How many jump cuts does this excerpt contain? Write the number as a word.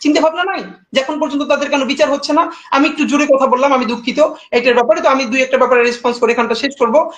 zero